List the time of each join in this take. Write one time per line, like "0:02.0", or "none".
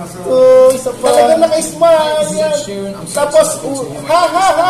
0:01.1